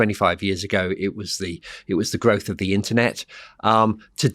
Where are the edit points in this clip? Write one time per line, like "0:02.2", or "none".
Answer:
none